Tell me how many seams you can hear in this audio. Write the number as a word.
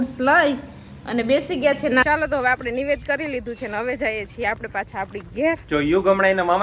two